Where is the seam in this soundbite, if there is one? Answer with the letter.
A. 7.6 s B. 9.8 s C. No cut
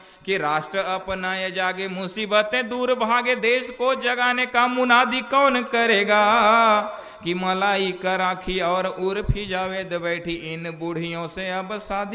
C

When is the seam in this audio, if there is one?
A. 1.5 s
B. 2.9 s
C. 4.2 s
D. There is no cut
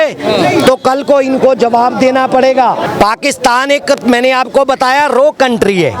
D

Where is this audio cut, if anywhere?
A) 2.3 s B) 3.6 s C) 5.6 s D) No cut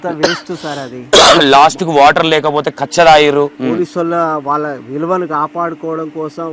B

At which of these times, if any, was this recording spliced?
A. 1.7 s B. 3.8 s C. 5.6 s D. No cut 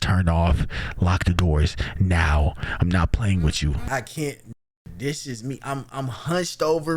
B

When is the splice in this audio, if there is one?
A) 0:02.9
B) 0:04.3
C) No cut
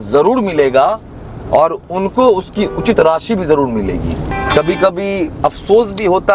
B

